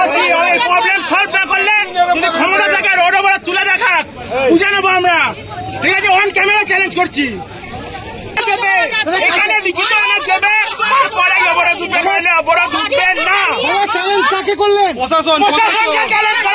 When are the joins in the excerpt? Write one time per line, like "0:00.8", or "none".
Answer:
none